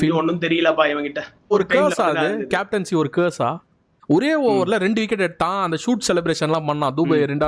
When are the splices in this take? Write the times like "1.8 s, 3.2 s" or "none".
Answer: 1.5 s, 3.9 s